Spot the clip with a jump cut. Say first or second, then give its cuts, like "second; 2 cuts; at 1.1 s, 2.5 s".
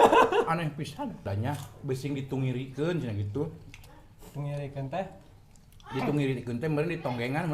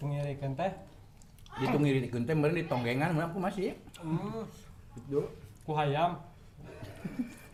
first; 1 cut; at 1.2 s